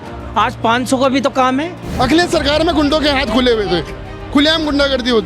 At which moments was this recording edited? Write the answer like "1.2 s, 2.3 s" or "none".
1.8 s